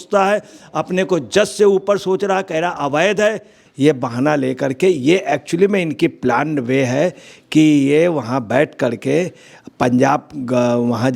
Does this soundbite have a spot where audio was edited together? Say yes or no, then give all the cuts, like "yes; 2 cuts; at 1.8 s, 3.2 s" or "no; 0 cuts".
yes; 1 cut; at 3.6 s